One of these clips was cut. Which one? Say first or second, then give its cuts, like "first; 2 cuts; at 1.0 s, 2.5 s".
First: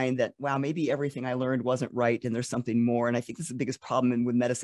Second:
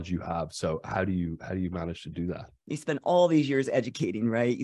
second; 1 cut; at 2.5 s